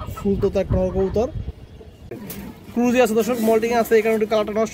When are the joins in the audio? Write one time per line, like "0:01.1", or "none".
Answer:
0:02.3